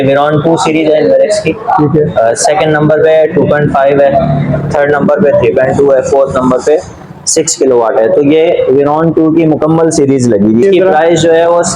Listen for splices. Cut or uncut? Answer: cut